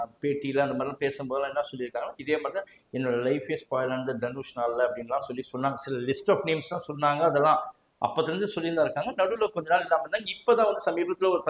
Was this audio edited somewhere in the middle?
no; 0 cuts

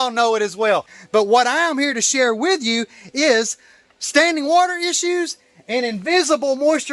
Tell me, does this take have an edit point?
yes; 1 cut; at 0.9 s

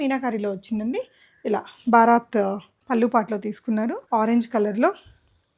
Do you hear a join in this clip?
yes; 2 cuts; at 2.7 s, 4.0 s

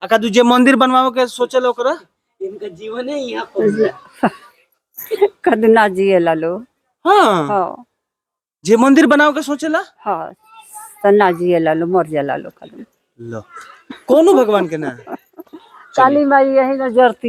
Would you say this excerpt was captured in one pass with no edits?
yes; 0 cuts

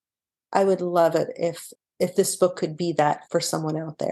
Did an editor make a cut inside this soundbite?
yes; 2 cuts; at 1.6 s, 3.2 s

